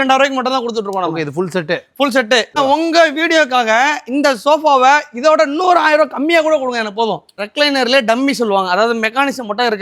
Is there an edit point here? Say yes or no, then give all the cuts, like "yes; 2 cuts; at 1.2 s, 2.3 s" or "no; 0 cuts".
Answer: yes; 2 cuts; at 2.6 s, 7.4 s